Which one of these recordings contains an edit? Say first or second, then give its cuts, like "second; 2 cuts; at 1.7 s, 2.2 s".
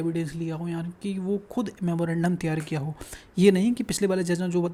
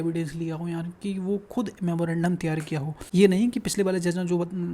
second; 1 cut; at 3.0 s